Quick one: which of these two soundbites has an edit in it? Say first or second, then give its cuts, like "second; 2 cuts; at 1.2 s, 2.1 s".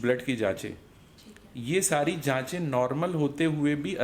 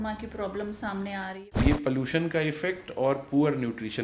second; 1 cut; at 1.3 s